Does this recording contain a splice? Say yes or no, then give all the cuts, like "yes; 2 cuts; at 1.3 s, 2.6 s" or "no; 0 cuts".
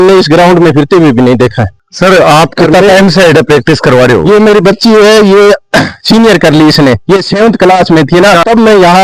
no; 0 cuts